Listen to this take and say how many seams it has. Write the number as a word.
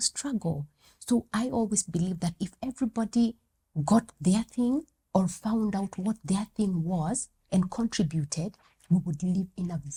zero